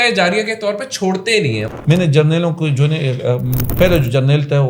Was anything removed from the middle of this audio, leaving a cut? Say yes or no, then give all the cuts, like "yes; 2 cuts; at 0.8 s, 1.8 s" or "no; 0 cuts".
yes; 2 cuts; at 1.7 s, 3.6 s